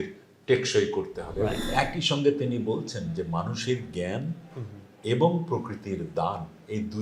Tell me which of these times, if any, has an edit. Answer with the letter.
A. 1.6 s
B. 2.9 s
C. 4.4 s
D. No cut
A